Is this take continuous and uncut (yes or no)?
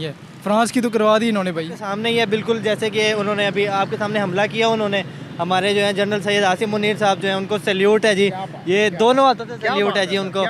no